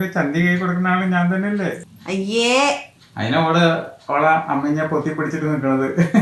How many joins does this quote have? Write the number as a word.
one